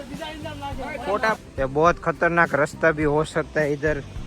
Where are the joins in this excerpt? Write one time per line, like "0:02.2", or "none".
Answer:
0:01.4